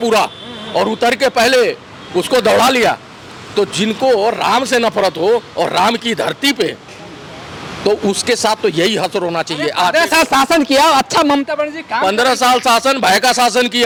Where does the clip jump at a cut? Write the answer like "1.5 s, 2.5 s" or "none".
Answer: none